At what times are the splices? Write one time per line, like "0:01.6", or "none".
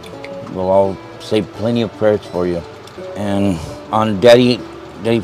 0:03.7